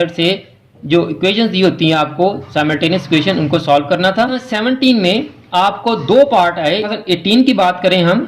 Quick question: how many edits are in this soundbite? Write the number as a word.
two